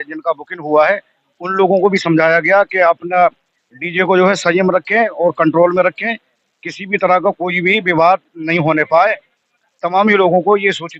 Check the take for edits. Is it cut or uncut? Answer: uncut